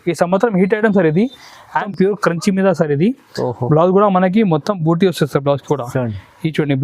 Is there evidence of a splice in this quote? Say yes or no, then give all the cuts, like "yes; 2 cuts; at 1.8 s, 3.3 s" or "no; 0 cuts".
yes; 1 cut; at 1.9 s